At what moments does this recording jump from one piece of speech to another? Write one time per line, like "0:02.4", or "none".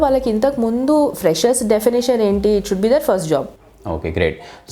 0:03.5